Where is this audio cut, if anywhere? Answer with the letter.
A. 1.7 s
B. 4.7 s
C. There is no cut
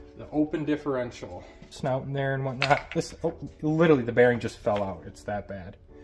A